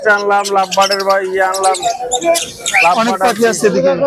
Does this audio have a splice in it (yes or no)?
no